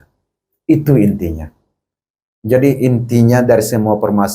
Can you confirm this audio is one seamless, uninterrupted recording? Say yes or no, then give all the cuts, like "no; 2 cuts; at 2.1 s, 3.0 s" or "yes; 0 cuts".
yes; 0 cuts